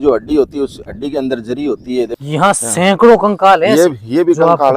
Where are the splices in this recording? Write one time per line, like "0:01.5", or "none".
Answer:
0:02.2